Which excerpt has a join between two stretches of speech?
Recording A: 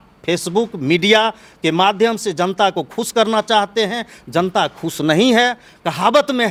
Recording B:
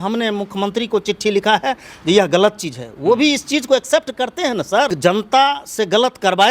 B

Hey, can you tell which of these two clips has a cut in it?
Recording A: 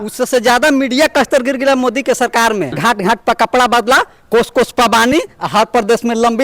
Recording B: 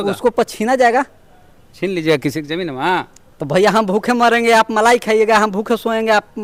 A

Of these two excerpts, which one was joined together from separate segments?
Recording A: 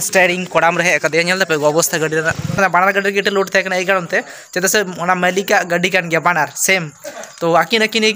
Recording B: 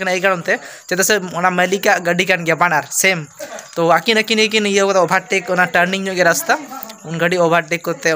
A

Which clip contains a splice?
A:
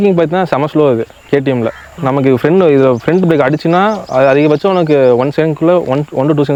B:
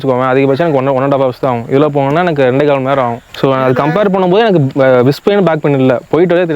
B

